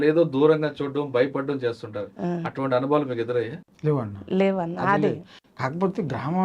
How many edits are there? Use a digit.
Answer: 0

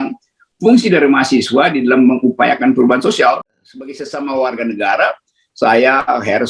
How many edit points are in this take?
1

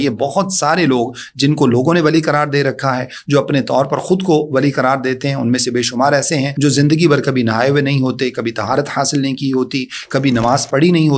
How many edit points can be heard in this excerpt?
1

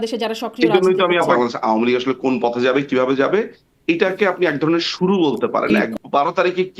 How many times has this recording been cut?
2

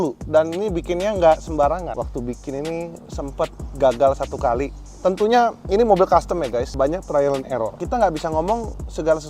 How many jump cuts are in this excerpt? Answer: 3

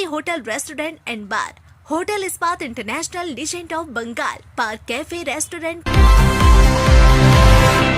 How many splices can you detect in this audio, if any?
1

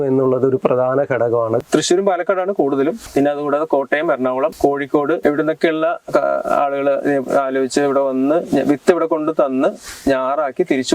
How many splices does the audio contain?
1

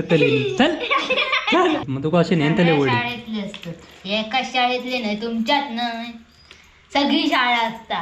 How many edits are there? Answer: 1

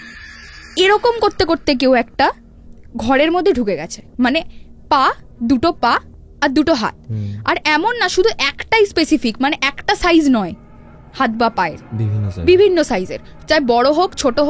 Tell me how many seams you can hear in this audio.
0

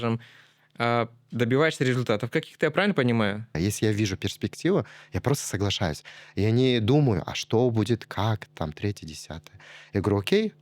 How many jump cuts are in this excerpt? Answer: 1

